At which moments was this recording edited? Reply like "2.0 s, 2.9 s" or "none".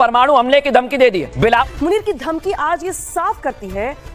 1.3 s